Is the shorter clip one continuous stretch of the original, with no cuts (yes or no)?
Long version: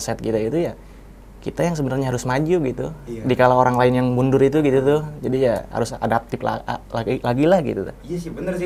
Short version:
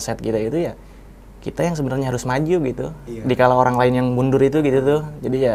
yes